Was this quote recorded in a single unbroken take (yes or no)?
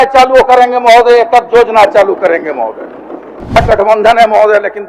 no